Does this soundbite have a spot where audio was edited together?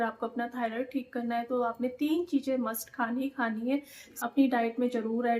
yes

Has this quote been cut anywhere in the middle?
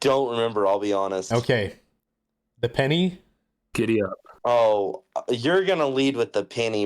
no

